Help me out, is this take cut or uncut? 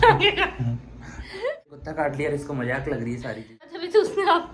cut